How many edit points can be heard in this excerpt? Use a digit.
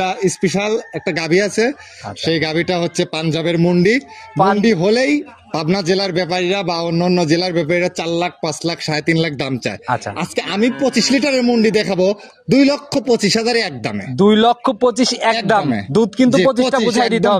0